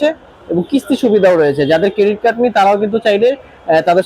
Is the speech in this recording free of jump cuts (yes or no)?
yes